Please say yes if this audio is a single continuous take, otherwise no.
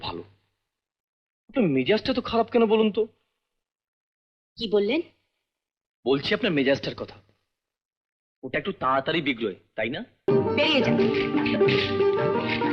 no